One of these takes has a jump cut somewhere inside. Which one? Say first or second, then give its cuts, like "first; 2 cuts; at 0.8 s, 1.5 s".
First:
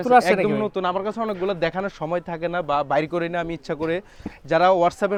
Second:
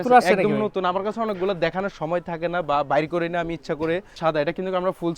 second; 1 cut; at 4.2 s